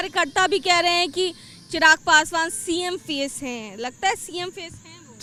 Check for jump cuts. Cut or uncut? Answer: uncut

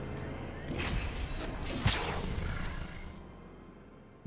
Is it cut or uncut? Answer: uncut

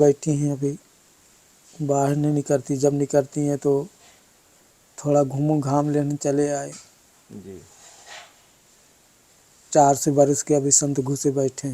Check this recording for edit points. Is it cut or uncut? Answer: uncut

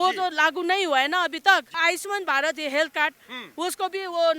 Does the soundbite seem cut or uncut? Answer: cut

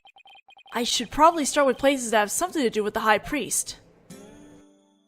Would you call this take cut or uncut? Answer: cut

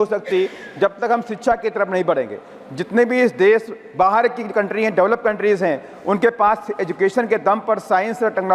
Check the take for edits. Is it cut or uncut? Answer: uncut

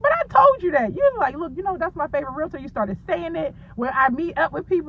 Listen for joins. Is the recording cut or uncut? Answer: uncut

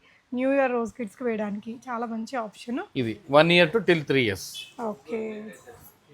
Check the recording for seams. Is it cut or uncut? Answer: cut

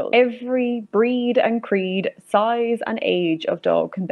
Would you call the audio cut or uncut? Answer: uncut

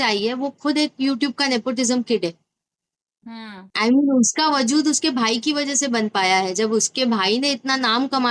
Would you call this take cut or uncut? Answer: uncut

